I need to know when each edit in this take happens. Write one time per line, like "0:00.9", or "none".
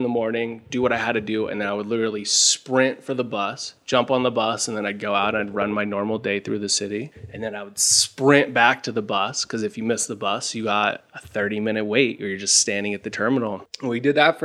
none